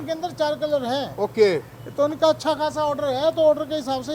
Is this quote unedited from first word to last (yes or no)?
yes